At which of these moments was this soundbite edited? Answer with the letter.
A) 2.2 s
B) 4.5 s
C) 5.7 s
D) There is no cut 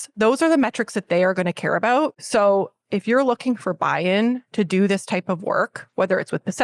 A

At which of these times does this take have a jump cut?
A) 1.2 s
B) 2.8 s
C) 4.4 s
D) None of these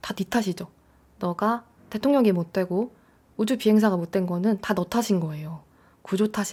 D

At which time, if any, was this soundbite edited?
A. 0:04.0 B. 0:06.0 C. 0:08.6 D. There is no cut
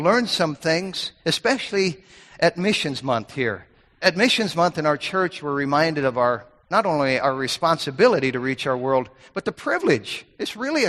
A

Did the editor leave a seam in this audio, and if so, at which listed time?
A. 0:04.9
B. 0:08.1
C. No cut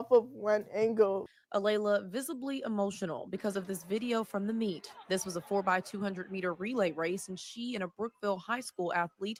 C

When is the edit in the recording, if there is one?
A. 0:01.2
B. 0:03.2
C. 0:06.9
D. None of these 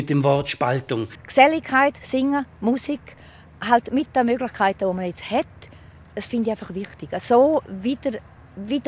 A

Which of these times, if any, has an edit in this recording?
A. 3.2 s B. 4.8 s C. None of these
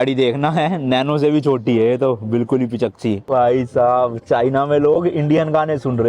A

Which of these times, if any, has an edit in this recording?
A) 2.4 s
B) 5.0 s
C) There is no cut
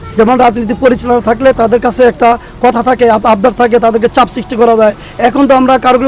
C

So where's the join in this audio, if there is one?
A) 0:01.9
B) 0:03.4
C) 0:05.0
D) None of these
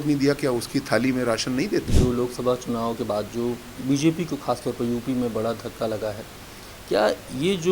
A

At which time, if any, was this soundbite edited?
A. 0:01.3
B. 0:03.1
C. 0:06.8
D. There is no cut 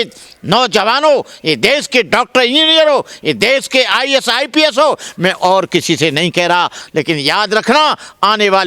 C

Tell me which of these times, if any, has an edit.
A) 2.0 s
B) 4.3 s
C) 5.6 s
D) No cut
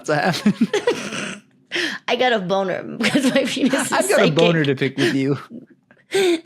C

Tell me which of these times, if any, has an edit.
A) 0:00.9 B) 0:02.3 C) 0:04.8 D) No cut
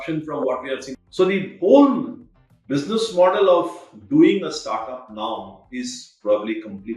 A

